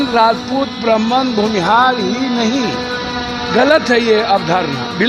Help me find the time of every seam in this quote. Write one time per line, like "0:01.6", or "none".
none